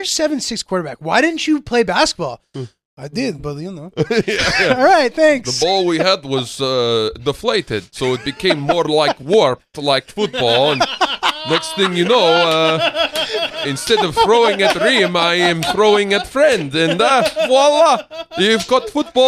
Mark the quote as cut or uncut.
uncut